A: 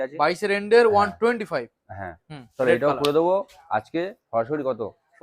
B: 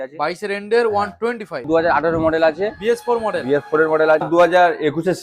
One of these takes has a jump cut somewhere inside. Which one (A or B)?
B